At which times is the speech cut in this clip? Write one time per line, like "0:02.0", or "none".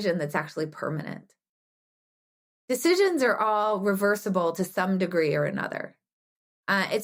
none